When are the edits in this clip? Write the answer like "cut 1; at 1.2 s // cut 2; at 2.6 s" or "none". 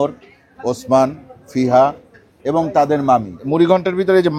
cut 1; at 3.4 s